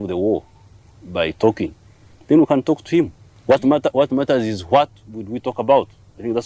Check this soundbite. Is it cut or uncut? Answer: cut